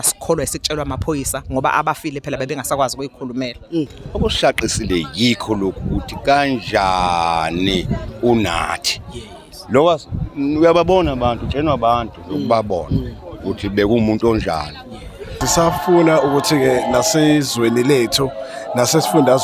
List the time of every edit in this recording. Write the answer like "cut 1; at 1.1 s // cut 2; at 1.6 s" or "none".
cut 1; at 4.0 s // cut 2; at 15.4 s